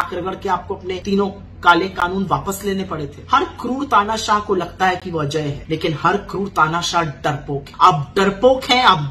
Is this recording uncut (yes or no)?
no